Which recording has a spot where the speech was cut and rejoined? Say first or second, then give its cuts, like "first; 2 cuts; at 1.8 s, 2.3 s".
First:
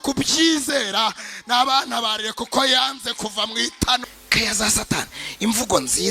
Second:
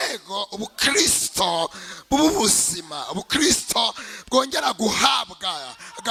first; 1 cut; at 4.0 s